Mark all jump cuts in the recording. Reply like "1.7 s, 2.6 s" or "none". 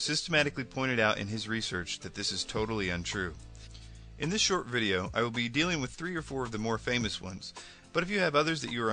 6.6 s